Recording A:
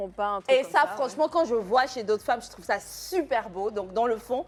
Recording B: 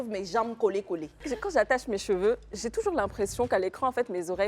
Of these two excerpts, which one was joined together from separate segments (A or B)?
B